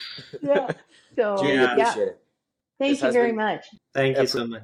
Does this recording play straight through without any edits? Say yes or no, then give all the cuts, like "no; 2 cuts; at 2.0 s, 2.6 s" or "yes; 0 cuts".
yes; 0 cuts